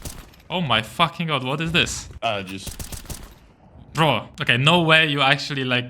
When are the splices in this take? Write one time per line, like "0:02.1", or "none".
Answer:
0:02.0
0:04.3